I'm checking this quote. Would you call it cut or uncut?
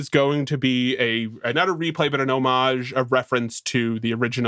uncut